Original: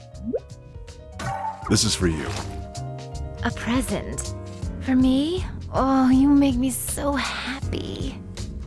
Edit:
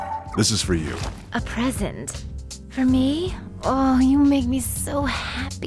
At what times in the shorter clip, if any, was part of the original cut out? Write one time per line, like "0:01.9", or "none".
0:01.1